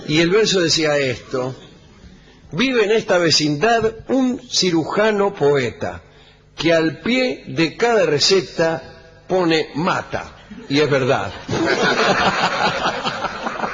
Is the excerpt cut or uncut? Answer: uncut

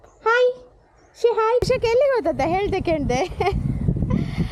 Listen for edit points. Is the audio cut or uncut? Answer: cut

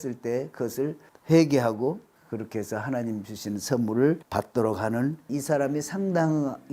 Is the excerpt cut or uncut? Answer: cut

